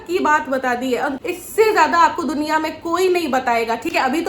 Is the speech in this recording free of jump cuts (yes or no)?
no